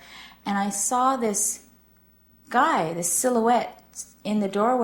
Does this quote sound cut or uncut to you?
uncut